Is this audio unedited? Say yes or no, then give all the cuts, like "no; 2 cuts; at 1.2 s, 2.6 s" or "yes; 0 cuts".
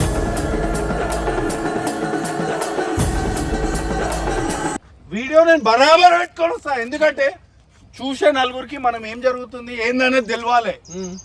no; 1 cut; at 4.7 s